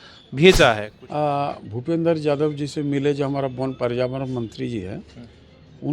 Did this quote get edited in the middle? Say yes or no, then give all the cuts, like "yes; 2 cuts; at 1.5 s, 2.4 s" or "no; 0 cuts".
yes; 1 cut; at 0.9 s